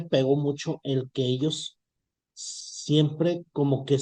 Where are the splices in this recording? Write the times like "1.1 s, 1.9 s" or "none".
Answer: none